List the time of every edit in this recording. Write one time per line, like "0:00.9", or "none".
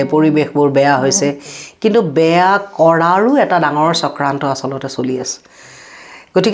none